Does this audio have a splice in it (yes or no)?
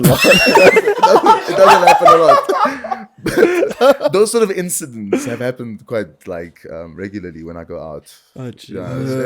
no